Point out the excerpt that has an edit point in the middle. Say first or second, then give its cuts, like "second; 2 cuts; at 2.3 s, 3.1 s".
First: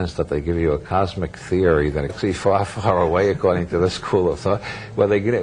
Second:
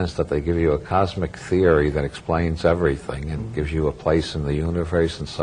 second; 1 cut; at 2.2 s